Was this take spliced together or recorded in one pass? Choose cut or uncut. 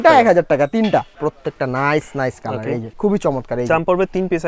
cut